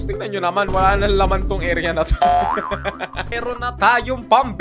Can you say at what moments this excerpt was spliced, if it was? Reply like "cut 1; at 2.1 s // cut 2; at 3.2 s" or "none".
cut 1; at 3.3 s